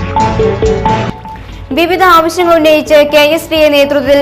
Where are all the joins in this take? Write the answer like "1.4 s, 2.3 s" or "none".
0.9 s